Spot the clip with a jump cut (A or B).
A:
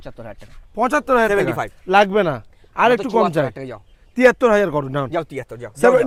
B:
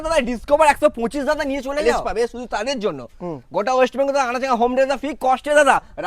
B